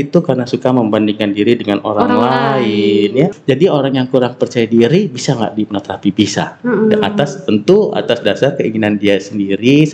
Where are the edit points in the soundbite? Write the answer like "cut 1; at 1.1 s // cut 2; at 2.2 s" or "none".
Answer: cut 1; at 3.4 s